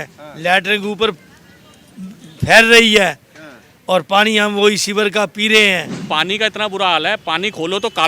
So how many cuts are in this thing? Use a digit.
1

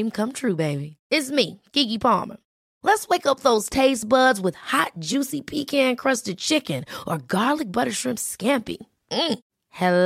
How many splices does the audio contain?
0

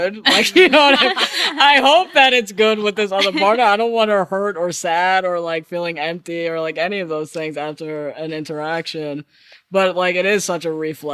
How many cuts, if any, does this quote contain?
0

